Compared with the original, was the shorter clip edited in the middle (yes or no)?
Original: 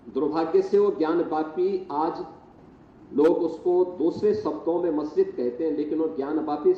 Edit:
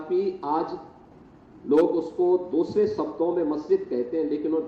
no